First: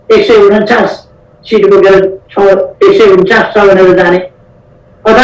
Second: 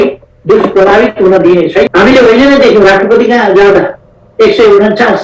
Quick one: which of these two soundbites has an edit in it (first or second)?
second